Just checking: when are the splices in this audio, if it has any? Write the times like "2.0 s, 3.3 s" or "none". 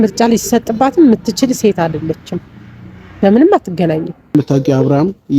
4.3 s